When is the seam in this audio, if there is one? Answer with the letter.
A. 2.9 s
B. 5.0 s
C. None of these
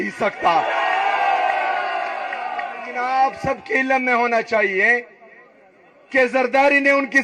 A